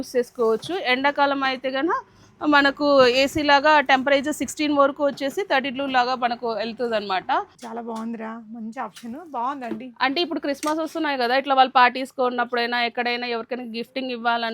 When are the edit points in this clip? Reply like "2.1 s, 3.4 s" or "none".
7.5 s